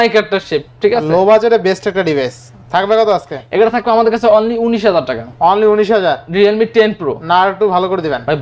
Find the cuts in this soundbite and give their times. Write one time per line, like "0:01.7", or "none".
none